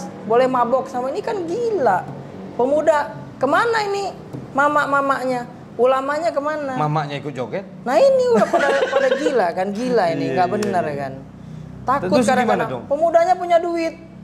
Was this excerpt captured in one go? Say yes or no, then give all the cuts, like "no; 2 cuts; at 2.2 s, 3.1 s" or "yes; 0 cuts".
yes; 0 cuts